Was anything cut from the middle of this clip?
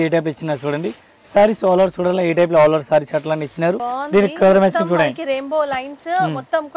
yes; 1 cut; at 3.9 s

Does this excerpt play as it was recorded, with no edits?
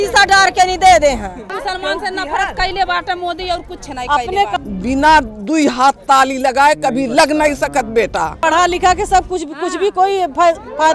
no; 3 cuts; at 1.5 s, 4.6 s, 8.4 s

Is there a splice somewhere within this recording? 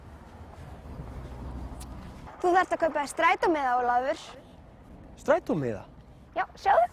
yes; 1 cut; at 2.3 s

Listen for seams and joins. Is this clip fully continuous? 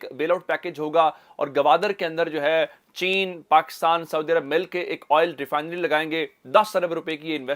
yes; 0 cuts

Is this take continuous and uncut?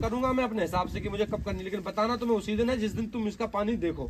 yes; 0 cuts

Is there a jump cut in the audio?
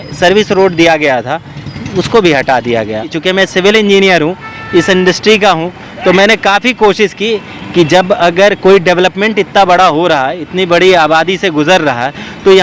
yes; 1 cut; at 3.1 s

